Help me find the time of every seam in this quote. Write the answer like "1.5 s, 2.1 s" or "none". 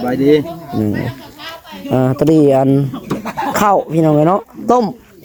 none